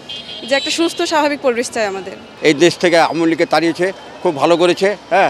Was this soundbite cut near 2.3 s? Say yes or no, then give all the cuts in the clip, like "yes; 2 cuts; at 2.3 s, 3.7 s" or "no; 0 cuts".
yes; 1 cut; at 2.3 s